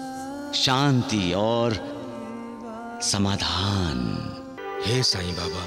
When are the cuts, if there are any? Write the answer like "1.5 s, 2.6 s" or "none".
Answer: 4.6 s